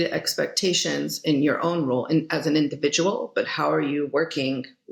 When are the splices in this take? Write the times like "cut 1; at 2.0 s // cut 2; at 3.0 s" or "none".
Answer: none